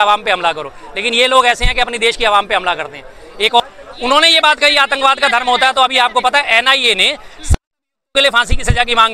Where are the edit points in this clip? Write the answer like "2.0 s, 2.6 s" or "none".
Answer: 3.6 s